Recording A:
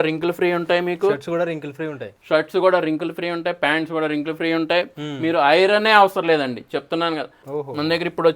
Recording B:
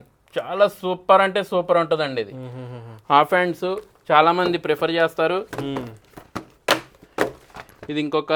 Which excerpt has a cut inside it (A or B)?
A